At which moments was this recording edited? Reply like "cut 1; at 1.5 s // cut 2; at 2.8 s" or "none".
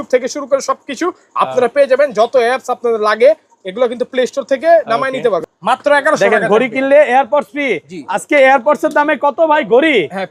cut 1; at 5.5 s